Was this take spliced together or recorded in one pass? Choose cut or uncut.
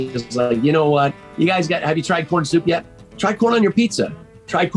cut